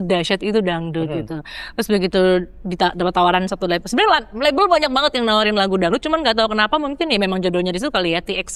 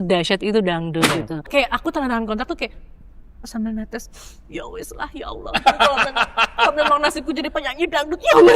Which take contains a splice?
second; 1 cut; at 1.5 s

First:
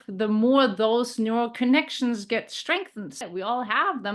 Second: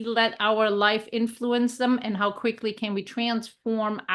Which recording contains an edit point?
first; 1 cut; at 3.2 s

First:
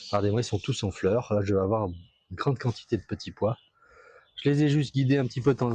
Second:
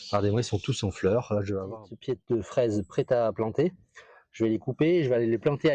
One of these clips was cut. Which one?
second; 1 cut; at 1.7 s

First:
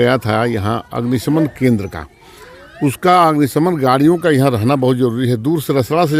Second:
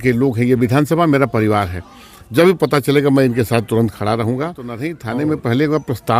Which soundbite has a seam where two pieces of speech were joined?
second; 1 cut; at 5.0 s

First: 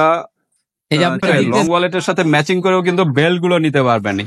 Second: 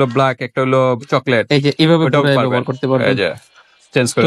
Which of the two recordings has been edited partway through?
first; 1 cut; at 1.4 s

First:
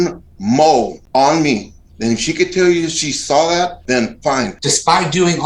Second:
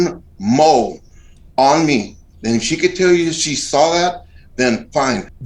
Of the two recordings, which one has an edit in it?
first; 3 cuts; at 1.0 s, 3.8 s, 4.6 s

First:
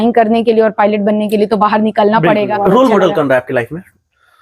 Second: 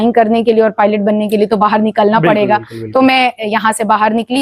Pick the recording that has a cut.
first; 1 cut; at 2.5 s

